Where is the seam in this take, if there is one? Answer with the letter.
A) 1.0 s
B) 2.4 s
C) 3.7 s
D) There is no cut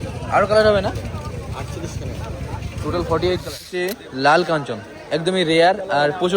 C